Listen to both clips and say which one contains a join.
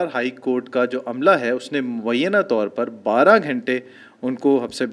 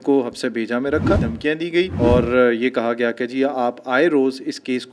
second; 1 cut; at 1.5 s

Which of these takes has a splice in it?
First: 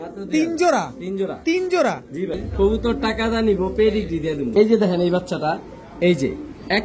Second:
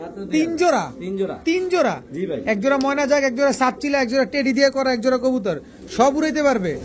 first; 2 cuts; at 2.4 s, 4.4 s

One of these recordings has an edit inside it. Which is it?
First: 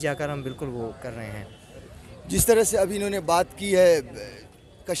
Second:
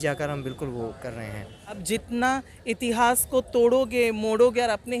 second; 1 cut; at 1.8 s

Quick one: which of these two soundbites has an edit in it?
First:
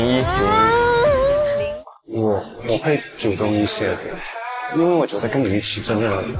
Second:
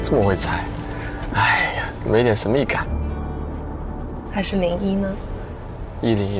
first; 1 cut; at 1.6 s

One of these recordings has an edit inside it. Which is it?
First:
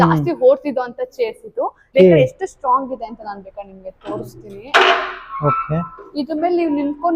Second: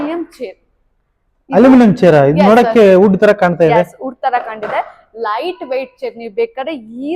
first; 1 cut; at 1.9 s

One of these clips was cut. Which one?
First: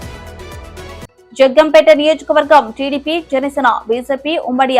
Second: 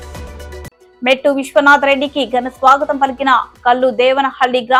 first; 1 cut; at 1.2 s

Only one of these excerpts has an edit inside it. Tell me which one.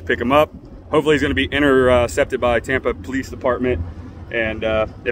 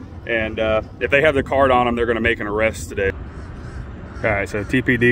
second; 1 cut; at 3.2 s

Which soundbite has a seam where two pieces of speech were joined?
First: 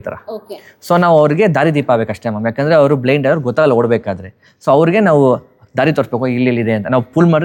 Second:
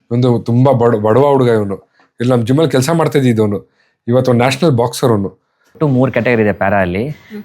second; 1 cut; at 5.8 s

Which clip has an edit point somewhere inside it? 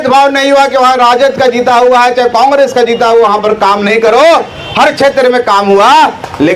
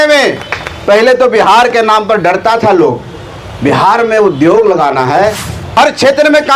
second; 1 cut; at 5.6 s

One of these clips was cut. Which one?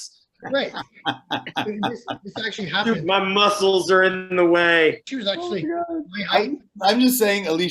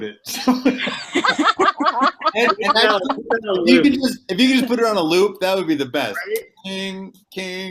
first; 1 cut; at 5.1 s

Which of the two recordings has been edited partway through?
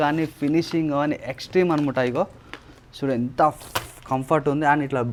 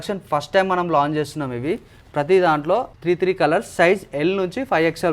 second; 1 cut; at 2.9 s

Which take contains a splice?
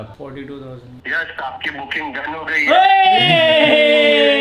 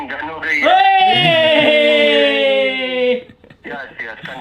first; 1 cut; at 1.0 s

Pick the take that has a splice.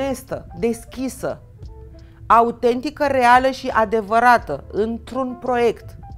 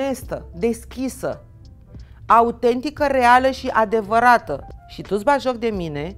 second; 1 cut; at 4.6 s

